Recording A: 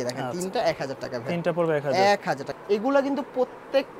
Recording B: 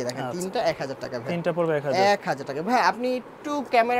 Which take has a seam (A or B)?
A